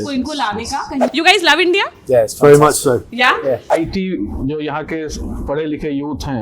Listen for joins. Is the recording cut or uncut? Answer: cut